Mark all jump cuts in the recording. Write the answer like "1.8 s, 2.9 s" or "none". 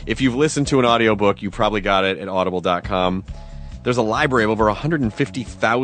1.5 s

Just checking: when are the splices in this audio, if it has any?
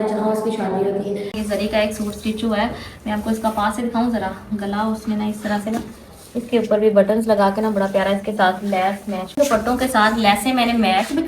1.4 s, 9.3 s

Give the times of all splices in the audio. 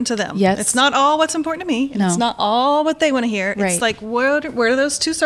none

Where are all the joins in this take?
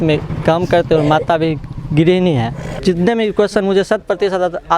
2.6 s

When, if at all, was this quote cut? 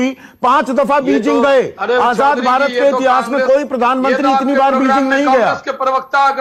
none

